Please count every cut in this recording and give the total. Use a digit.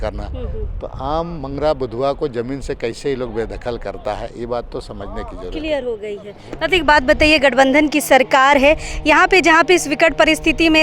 0